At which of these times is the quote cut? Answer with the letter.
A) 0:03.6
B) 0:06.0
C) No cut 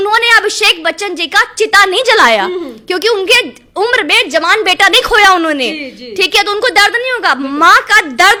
C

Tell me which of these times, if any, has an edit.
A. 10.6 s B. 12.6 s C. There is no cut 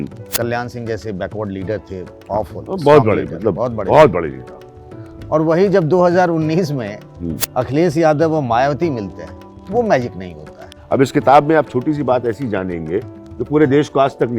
A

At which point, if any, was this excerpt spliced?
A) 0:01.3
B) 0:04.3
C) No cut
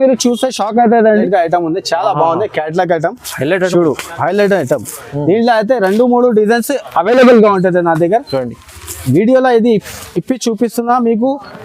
A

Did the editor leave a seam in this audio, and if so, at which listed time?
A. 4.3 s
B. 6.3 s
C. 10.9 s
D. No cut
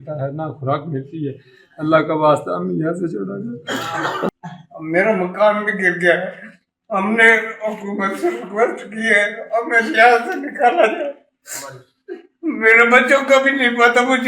A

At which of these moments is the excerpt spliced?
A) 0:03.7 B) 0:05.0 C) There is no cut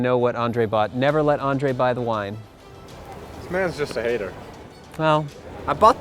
C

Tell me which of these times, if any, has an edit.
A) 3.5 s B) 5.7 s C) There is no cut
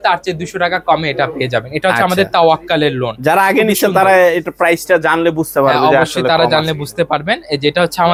C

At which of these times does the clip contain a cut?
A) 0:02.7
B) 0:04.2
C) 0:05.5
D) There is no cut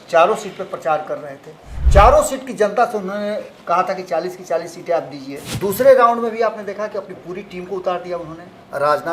C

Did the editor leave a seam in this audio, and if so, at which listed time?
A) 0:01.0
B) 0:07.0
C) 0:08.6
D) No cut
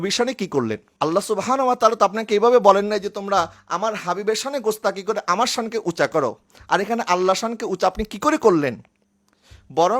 D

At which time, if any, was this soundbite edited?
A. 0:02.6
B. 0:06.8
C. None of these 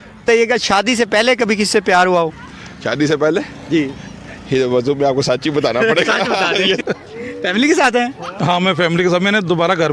B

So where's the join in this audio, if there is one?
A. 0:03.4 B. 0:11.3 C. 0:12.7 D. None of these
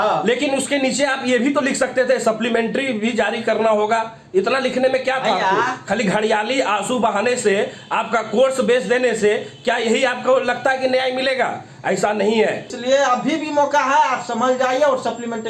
C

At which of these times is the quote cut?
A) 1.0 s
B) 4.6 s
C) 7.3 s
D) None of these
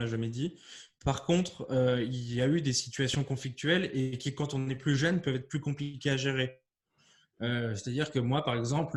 D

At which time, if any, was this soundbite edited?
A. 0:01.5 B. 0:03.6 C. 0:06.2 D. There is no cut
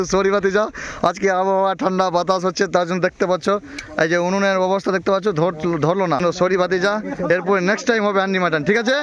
C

